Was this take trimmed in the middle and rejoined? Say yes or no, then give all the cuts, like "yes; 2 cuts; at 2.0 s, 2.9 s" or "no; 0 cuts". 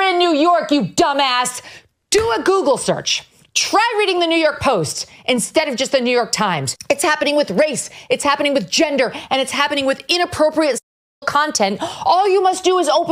no; 0 cuts